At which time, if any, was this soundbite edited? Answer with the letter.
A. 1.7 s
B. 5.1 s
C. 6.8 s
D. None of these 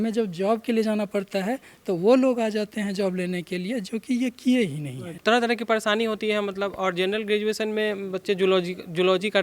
B